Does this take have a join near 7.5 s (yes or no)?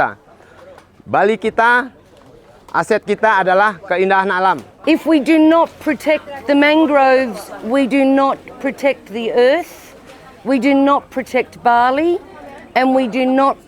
no